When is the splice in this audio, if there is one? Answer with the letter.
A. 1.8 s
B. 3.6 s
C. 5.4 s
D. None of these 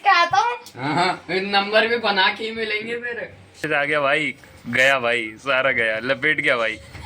B